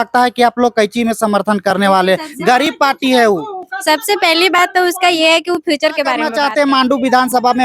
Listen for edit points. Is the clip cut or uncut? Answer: cut